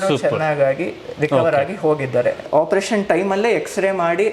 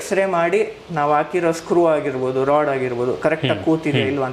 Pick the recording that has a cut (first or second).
first